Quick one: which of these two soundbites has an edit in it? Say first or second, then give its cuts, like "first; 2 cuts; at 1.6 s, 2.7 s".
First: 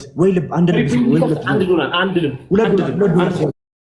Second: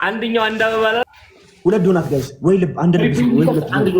second; 1 cut; at 1.0 s